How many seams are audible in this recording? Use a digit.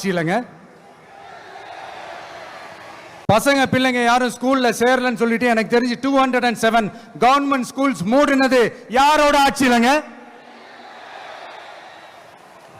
1